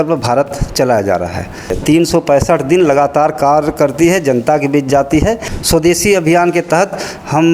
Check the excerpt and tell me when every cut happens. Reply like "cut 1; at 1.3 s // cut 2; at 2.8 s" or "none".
cut 1; at 1.8 s // cut 2; at 5.5 s